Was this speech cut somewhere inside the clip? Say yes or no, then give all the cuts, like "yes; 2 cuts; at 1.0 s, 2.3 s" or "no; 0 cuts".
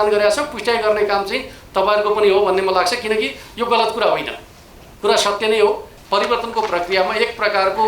yes; 1 cut; at 5.9 s